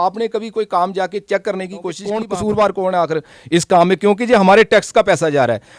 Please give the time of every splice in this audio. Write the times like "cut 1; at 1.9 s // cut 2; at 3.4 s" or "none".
cut 1; at 2.0 s